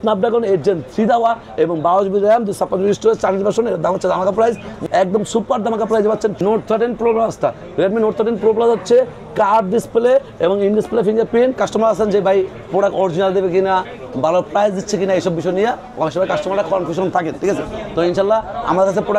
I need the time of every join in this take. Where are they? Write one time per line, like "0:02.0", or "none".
0:04.8
0:06.4
0:11.6